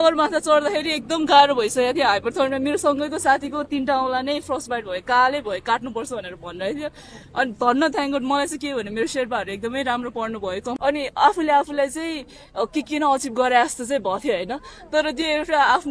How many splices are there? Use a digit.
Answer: 1